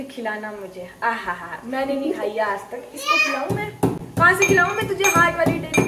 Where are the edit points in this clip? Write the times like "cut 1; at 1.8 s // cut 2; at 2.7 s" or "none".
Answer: none